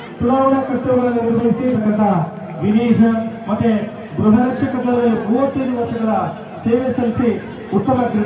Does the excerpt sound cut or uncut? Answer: cut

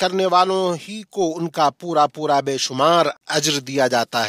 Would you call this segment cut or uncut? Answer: cut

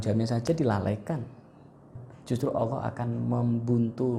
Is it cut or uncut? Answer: cut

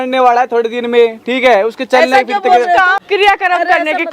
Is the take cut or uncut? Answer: cut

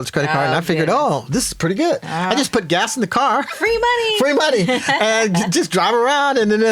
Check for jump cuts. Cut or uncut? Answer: uncut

